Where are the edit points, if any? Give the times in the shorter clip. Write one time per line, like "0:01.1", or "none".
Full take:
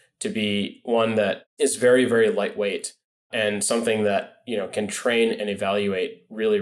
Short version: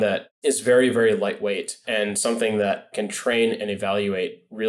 0:01.7
0:02.9